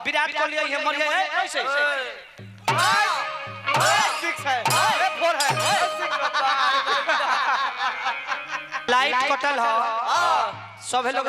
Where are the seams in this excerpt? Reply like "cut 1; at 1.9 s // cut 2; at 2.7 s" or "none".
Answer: cut 1; at 8.9 s